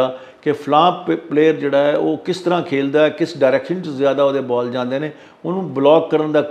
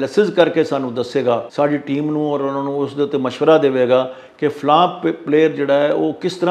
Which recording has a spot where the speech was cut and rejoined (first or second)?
second